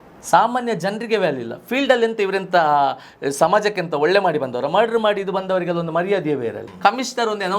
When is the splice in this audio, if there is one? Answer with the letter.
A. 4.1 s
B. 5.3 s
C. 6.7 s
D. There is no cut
C